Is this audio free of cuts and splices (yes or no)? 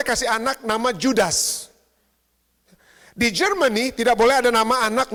yes